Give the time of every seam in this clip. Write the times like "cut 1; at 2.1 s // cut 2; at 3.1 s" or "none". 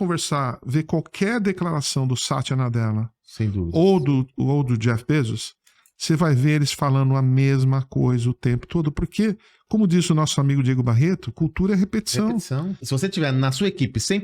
cut 1; at 12.8 s